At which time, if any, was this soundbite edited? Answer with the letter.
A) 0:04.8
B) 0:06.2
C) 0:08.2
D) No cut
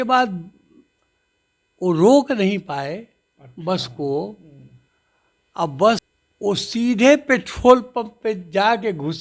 B